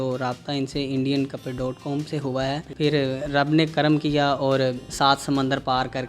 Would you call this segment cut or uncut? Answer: cut